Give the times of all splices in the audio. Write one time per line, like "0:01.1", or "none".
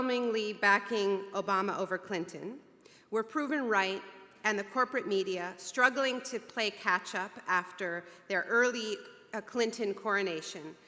0:03.6